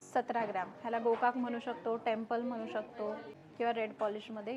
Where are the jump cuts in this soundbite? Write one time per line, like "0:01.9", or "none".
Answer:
0:03.4